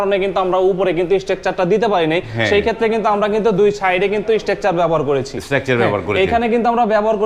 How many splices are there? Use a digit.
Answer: 0